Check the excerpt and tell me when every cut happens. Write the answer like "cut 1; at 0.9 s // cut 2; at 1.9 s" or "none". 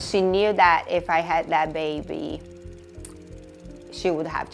none